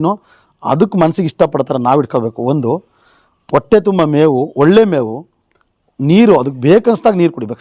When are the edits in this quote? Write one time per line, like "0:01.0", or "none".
none